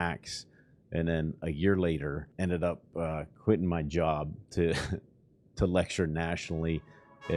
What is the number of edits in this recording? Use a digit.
1